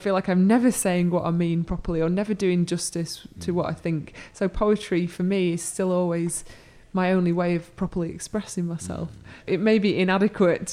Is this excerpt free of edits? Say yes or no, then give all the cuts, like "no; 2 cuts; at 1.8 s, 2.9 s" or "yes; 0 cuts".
no; 1 cut; at 9.5 s